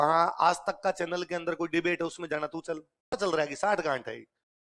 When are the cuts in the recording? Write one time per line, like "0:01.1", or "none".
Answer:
0:03.2

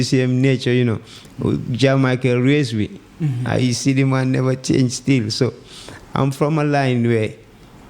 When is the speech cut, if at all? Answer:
none

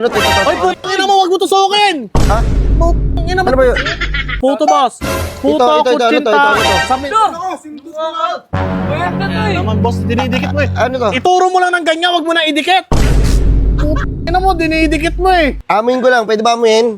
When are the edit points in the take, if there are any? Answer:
0:04.3
0:15.6

